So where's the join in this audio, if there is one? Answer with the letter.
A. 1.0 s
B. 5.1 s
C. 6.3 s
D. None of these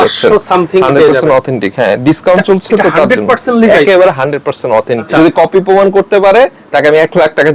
B